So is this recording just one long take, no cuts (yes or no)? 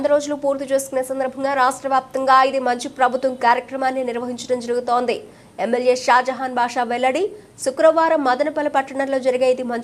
yes